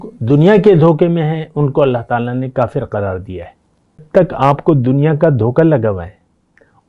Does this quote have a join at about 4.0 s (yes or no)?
yes